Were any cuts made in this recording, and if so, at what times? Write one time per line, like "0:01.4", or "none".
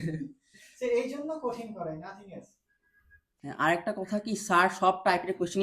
0:03.3